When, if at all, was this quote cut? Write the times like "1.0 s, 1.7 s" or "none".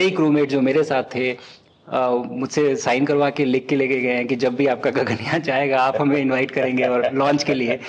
none

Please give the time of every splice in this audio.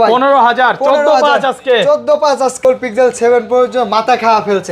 2.6 s

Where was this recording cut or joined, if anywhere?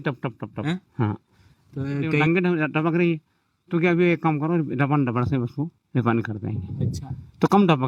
2.2 s

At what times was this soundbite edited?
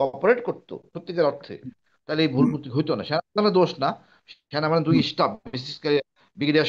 none

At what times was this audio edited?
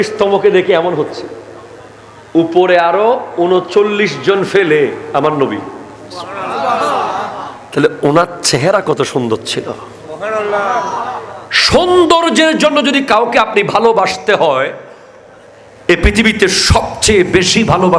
none

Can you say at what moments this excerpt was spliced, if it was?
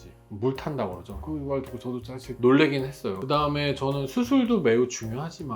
1.1 s, 3.1 s

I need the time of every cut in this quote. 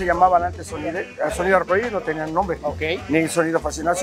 none

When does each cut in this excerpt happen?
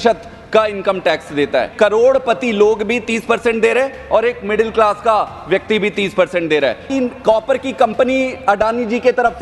1.7 s, 6.9 s

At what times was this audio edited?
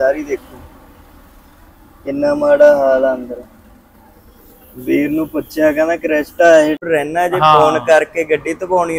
6.8 s

